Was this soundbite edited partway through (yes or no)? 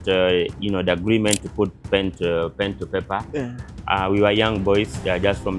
no